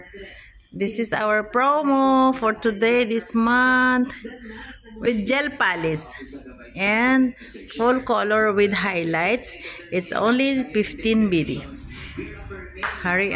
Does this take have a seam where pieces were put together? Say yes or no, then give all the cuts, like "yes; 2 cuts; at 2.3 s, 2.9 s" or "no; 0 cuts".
yes; 1 cut; at 5.1 s